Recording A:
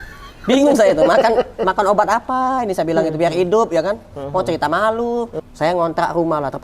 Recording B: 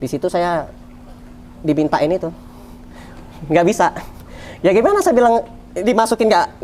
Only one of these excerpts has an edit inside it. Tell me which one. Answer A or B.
A